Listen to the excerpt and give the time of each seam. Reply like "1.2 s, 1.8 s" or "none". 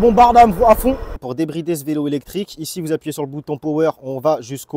1.2 s